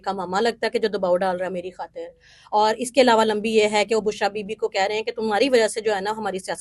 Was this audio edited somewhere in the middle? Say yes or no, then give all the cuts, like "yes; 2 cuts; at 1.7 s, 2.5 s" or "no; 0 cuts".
no; 0 cuts